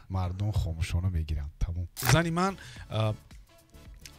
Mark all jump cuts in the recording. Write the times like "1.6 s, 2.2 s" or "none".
2.0 s